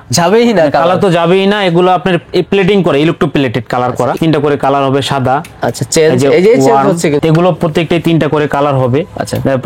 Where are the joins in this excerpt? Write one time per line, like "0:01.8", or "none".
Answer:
0:04.1
0:07.2